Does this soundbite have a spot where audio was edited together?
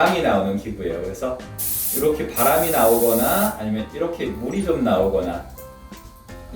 no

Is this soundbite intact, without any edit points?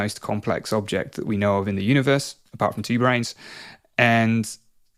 yes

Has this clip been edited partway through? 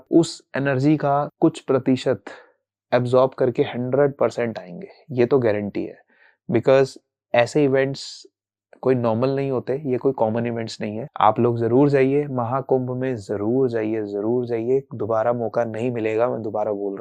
no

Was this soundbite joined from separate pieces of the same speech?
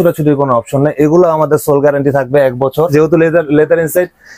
yes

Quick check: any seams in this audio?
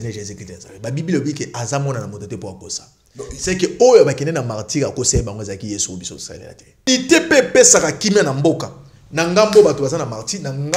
yes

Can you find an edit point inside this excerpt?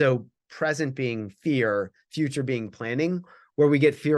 no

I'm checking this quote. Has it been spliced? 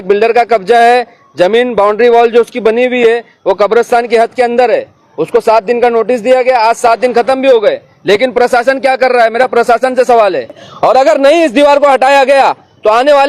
yes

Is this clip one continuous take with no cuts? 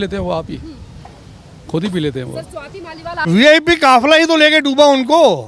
no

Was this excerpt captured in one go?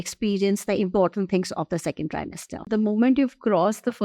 no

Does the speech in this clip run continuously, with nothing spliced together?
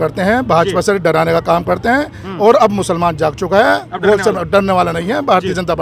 yes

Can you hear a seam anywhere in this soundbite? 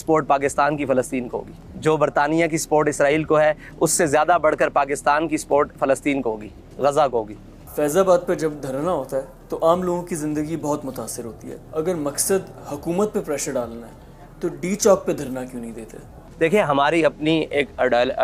no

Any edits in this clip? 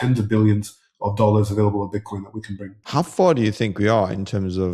yes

